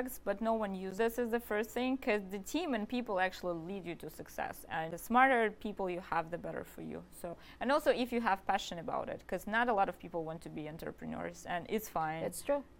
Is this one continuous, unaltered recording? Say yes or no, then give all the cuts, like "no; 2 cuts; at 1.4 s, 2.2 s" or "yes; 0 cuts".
no; 3 cuts; at 0.9 s, 4.9 s, 7.4 s